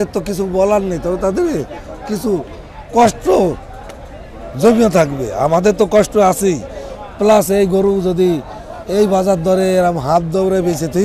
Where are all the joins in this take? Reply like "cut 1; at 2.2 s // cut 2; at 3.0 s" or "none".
none